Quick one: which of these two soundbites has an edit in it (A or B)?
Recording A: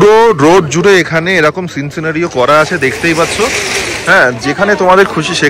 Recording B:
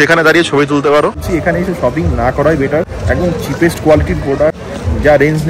B